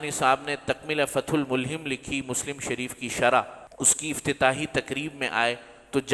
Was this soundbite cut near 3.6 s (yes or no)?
yes